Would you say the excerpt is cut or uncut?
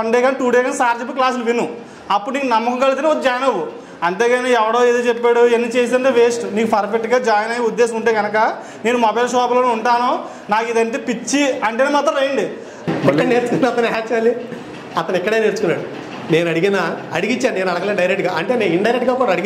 cut